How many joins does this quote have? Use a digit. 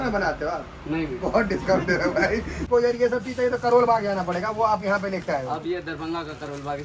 1